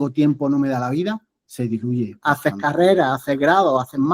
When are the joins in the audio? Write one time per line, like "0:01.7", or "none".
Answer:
0:02.1

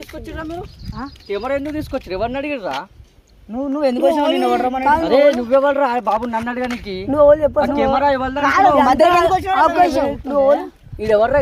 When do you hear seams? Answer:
none

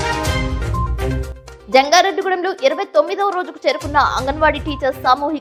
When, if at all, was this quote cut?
none

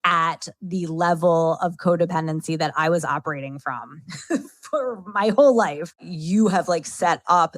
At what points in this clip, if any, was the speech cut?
0:06.1

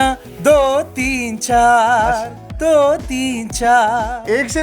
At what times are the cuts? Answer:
none

